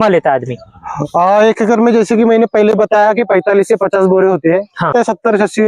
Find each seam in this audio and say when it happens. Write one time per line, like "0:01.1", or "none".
0:04.8